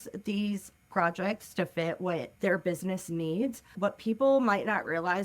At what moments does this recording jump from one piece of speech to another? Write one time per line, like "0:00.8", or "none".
0:02.3
0:03.7